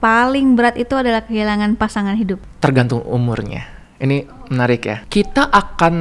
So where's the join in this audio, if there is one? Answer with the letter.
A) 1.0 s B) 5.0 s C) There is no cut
B